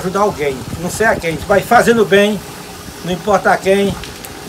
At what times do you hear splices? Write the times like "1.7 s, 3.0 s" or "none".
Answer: none